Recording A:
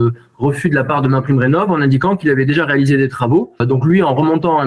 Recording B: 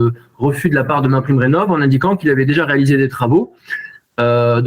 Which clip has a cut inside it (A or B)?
A